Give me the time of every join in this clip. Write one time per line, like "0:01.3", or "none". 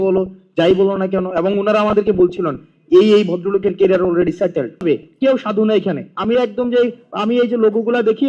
0:04.8